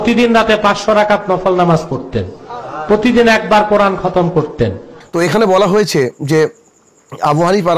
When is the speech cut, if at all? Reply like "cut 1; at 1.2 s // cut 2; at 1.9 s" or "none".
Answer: cut 1; at 4.9 s